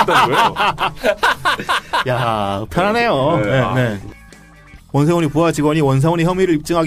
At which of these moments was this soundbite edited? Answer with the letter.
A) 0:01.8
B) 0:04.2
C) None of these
B